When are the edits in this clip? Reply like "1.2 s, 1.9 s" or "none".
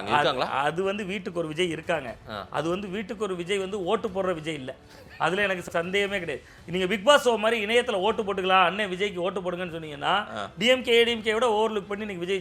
5.7 s